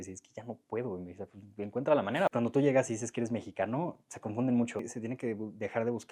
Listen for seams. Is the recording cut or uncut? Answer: cut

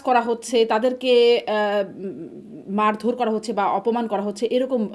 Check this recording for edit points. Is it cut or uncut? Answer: uncut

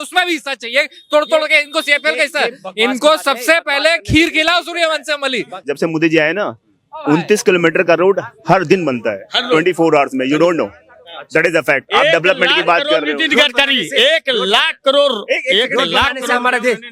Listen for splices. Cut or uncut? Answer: cut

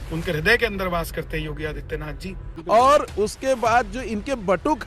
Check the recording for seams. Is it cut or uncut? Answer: cut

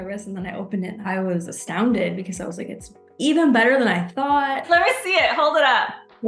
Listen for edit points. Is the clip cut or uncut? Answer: cut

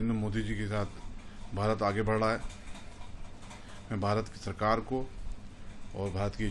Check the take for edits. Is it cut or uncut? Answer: uncut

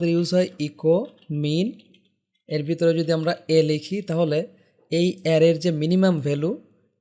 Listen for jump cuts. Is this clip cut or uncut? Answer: uncut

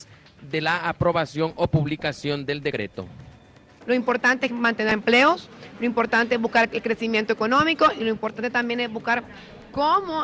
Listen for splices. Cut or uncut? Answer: cut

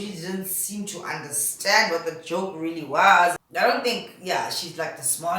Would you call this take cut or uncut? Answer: cut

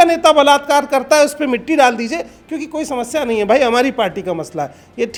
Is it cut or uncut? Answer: uncut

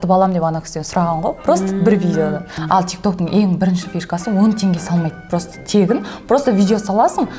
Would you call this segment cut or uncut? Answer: cut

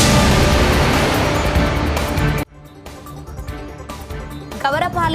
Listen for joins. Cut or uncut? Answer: cut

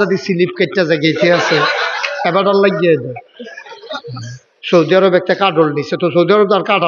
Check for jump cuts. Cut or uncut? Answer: cut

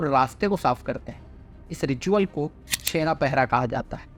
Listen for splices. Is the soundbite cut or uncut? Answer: uncut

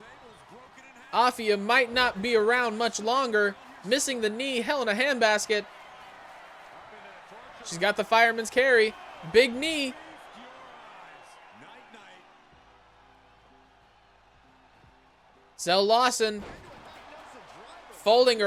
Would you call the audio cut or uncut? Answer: uncut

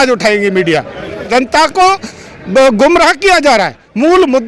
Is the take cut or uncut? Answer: cut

